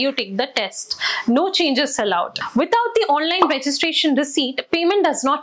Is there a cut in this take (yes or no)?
yes